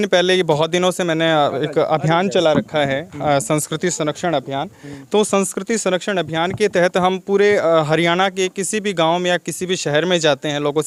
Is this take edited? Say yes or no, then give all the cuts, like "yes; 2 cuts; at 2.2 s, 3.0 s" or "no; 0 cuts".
no; 0 cuts